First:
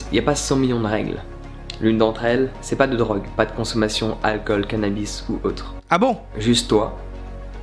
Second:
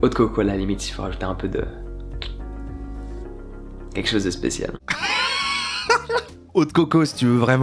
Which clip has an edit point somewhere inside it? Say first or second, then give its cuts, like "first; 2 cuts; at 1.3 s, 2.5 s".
first; 1 cut; at 6.3 s